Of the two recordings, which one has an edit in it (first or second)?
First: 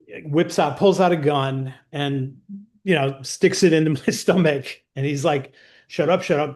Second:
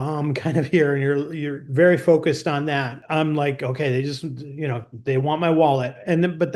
second